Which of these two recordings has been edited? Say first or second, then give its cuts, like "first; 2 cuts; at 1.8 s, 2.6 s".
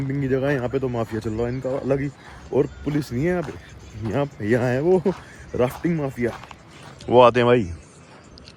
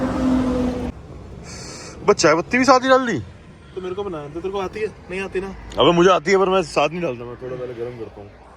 second; 1 cut; at 1.0 s